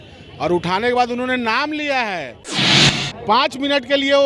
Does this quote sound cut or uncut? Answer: cut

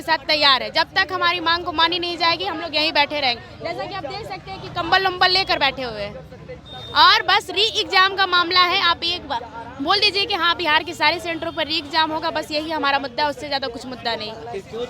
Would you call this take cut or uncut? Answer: uncut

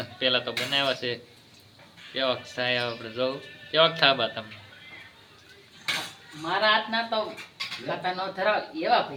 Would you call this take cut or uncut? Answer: uncut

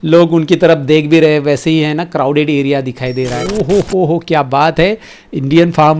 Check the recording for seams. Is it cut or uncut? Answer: cut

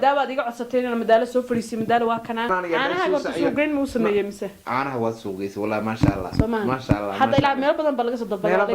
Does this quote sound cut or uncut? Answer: cut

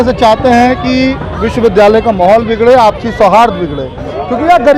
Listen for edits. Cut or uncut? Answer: uncut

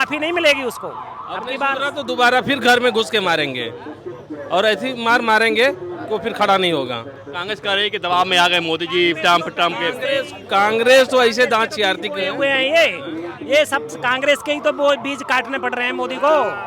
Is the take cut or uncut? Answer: uncut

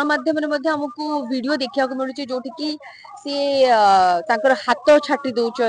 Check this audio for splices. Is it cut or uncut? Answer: uncut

